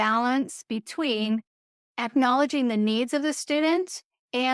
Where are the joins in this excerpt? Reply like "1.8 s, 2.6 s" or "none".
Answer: none

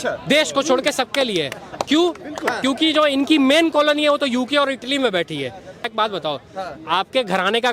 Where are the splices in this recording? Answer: 5.9 s

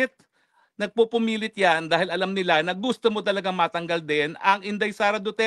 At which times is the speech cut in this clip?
none

